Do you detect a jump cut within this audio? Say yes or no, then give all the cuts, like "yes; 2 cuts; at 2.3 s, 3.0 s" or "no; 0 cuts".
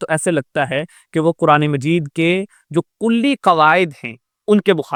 no; 0 cuts